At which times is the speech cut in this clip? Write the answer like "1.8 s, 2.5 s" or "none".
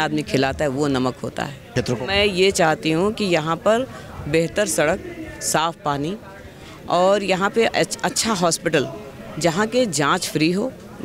1.7 s